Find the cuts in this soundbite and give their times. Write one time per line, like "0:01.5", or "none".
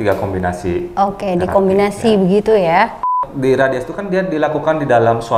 0:03.3